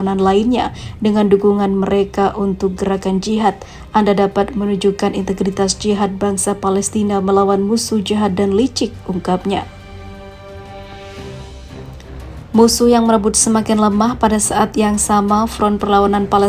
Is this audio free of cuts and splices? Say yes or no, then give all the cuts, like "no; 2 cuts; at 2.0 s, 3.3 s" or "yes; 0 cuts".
yes; 0 cuts